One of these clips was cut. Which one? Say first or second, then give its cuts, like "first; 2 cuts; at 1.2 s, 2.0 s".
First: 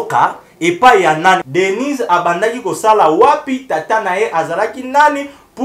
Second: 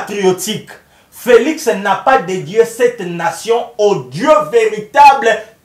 first; 1 cut; at 1.4 s